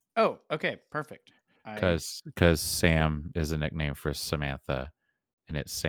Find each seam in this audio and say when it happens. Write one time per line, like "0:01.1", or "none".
0:01.8